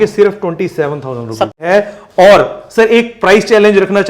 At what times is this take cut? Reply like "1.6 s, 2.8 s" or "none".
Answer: 1.6 s